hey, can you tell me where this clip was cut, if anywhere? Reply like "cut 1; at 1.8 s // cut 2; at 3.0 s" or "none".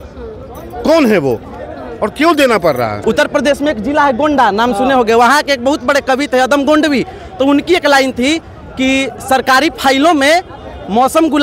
cut 1; at 3.0 s